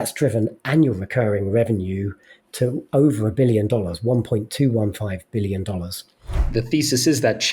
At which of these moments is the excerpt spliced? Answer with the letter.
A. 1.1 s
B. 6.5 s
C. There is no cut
B